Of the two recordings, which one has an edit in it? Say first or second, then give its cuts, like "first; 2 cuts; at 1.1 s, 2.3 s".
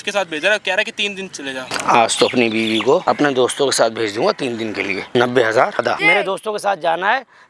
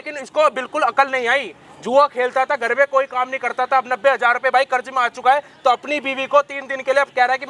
first; 4 cuts; at 1.8 s, 3.0 s, 5.0 s, 5.9 s